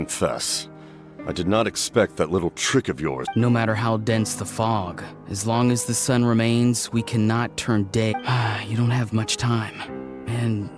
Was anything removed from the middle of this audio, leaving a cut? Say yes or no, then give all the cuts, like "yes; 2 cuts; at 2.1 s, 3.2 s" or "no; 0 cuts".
yes; 2 cuts; at 3.2 s, 8.1 s